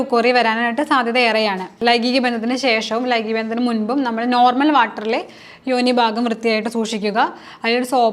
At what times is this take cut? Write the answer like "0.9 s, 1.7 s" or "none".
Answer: 1.7 s